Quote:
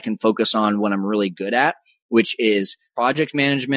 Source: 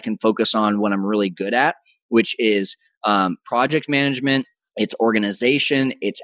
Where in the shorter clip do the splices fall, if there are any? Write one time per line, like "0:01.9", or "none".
0:02.9